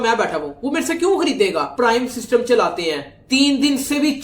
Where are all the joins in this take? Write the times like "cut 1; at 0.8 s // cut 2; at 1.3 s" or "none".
cut 1; at 1.7 s